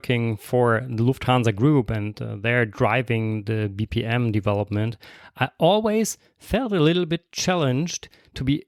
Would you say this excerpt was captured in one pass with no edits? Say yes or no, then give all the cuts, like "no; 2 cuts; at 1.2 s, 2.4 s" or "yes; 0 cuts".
yes; 0 cuts